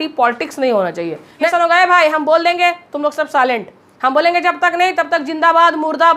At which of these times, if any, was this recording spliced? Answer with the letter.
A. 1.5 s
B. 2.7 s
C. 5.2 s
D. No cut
A